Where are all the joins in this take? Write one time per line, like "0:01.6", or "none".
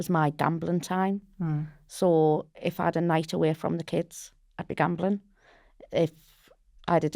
none